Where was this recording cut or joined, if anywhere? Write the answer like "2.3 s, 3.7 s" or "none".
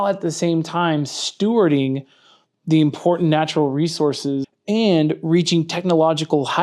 4.5 s